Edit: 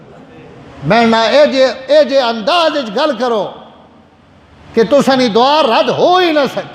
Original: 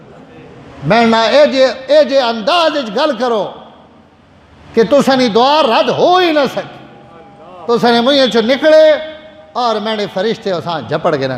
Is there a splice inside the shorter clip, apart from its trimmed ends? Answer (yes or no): no